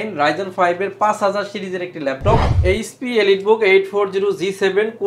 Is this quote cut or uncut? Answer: cut